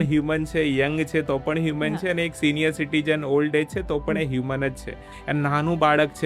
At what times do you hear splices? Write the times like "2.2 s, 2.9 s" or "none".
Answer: 5.1 s